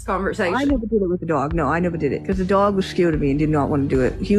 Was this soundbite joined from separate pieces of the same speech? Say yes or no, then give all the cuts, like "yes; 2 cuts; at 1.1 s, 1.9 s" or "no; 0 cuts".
yes; 1 cut; at 2.2 s